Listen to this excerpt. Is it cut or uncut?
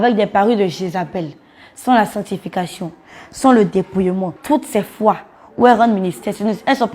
cut